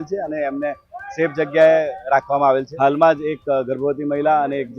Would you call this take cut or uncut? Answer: cut